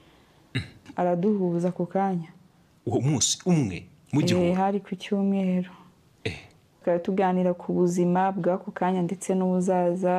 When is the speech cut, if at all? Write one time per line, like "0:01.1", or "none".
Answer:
0:00.8
0:06.8